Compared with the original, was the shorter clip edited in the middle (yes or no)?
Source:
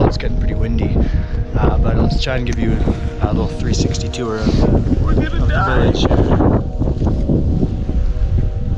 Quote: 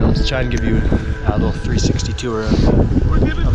no